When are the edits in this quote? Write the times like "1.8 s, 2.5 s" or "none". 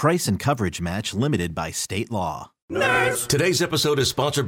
2.5 s